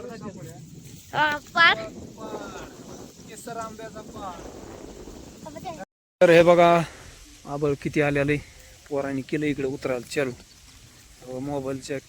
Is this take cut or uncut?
cut